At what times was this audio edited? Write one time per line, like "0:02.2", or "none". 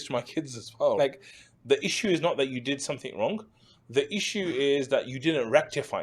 0:01.0